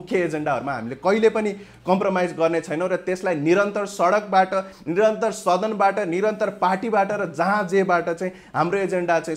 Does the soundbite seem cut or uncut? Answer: uncut